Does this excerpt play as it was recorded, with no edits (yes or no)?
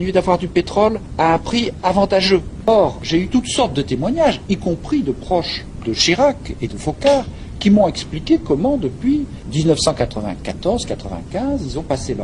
no